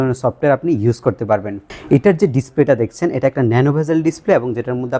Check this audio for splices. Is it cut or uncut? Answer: cut